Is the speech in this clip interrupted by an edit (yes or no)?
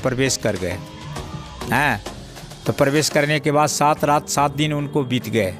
no